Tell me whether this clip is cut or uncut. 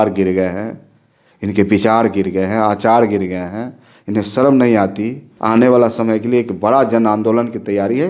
cut